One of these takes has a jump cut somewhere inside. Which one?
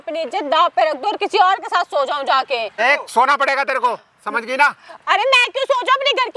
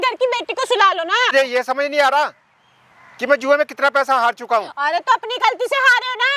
second; 1 cut; at 1.3 s

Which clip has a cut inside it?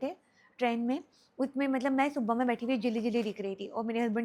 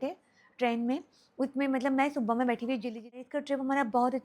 second; 1 cut; at 3.3 s

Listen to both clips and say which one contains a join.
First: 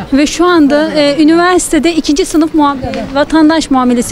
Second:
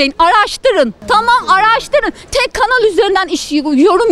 second; 1 cut; at 1.0 s

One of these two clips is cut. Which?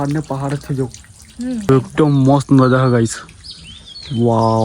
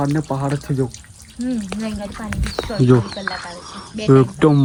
first; 1 cut; at 1.7 s

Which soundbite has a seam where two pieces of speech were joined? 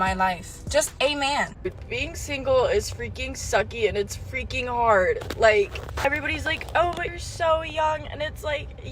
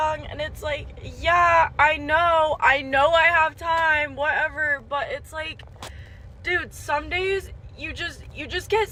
first; 2 cuts; at 1.6 s, 6.1 s

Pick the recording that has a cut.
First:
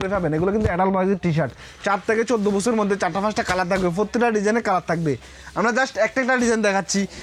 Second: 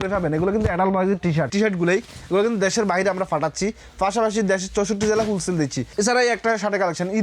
second; 2 cuts; at 1.5 s, 5.8 s

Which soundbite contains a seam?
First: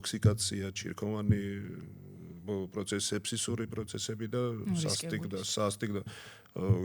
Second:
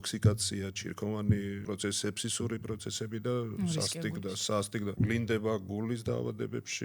second; 2 cuts; at 1.6 s, 5.0 s

